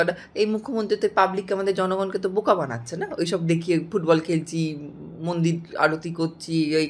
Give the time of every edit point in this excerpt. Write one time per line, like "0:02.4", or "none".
none